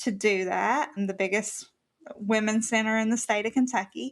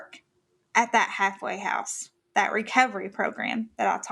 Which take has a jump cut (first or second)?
first